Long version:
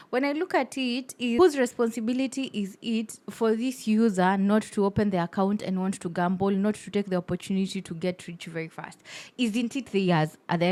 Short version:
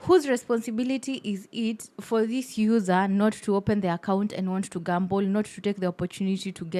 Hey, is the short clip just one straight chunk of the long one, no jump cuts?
yes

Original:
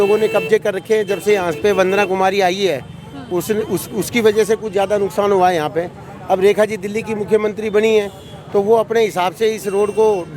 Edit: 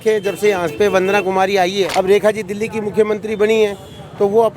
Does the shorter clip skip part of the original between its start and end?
yes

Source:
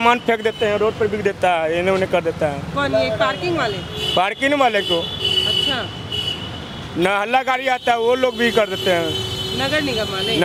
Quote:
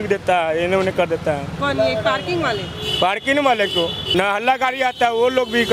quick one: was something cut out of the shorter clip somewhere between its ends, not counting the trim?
yes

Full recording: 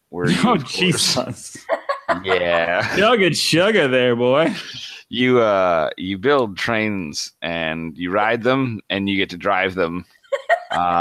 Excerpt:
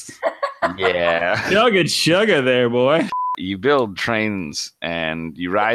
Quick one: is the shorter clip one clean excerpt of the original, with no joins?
no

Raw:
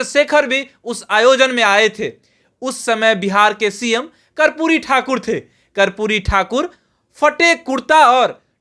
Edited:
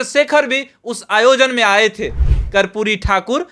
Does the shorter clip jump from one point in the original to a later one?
yes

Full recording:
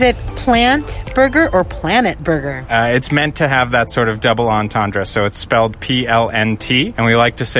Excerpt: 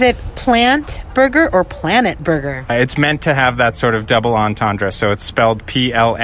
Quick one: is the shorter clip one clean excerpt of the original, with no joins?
no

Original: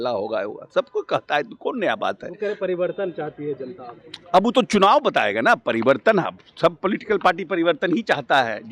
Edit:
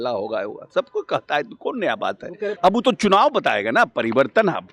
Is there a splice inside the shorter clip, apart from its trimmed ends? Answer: yes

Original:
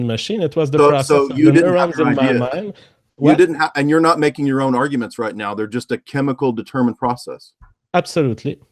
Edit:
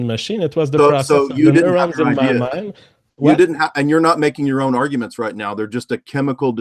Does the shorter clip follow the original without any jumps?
yes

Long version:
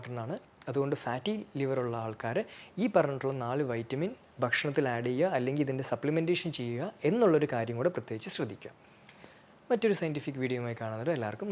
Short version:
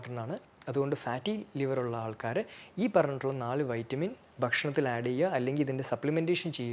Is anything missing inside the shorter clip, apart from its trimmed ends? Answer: no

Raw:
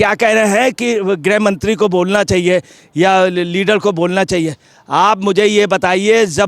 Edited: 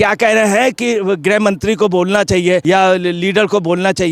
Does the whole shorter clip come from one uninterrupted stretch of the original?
no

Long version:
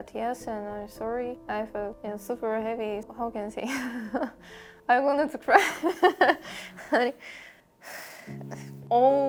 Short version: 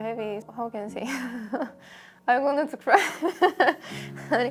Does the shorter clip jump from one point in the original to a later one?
no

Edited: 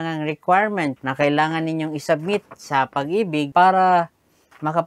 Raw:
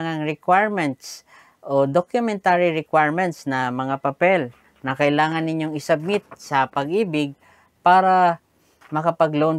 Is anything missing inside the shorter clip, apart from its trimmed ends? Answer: yes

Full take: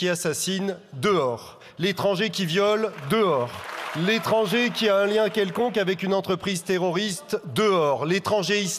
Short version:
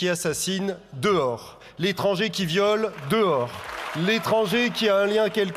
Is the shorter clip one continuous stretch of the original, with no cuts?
yes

